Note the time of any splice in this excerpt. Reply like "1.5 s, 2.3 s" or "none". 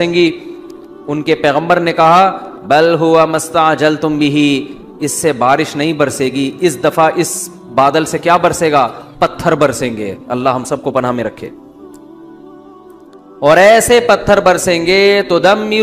12.1 s, 13.4 s